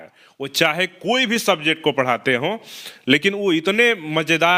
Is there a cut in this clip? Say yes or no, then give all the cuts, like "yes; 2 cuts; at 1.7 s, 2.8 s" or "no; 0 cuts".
no; 0 cuts